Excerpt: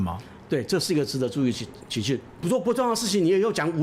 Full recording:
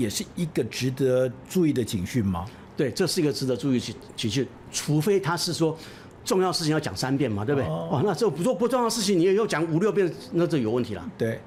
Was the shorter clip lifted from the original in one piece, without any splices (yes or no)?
no